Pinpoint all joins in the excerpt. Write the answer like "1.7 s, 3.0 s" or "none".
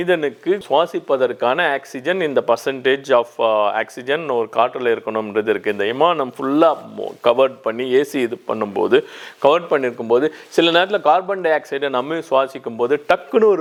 none

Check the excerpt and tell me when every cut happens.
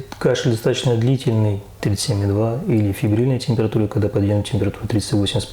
1.7 s

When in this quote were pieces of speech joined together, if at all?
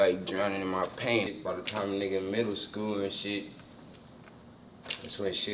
1.3 s

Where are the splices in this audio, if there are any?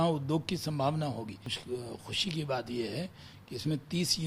1.5 s

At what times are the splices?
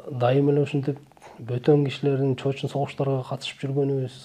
none

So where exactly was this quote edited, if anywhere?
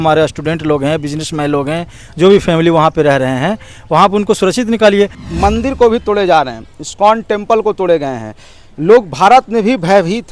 5.2 s

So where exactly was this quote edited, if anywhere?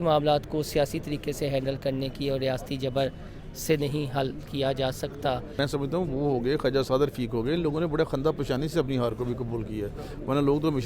5.5 s

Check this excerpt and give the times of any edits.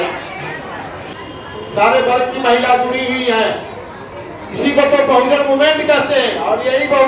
1.0 s

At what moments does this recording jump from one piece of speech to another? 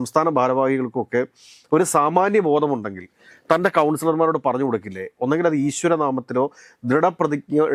none

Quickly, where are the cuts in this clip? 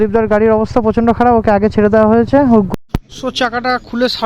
2.7 s

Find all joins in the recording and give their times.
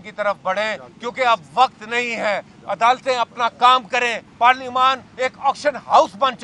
4.2 s

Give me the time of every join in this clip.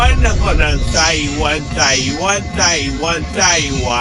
none

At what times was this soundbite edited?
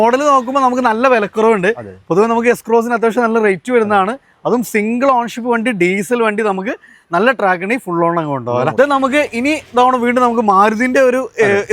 none

